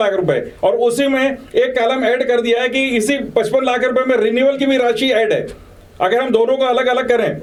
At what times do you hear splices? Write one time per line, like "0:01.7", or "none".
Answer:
none